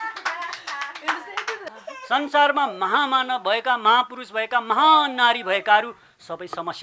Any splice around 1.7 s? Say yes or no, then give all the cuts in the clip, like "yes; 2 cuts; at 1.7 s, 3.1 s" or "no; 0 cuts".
yes; 1 cut; at 1.7 s